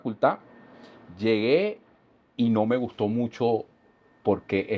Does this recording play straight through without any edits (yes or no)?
yes